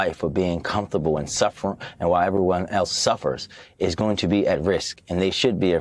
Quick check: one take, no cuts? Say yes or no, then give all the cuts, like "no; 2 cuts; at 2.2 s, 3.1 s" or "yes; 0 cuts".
yes; 0 cuts